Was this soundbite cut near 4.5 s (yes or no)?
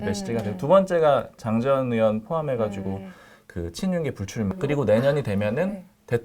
yes